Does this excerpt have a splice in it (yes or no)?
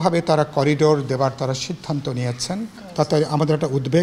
yes